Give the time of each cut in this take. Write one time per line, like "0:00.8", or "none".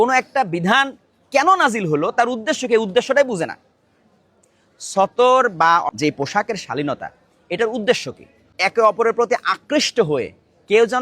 0:05.9